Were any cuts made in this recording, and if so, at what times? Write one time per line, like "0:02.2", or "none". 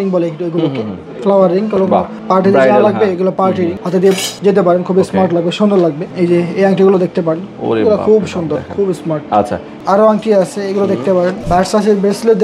0:04.2
0:06.0
0:09.6
0:11.4